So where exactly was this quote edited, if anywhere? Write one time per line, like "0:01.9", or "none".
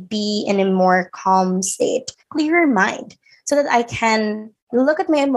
0:02.2